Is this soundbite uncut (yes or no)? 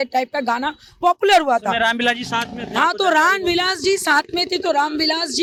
yes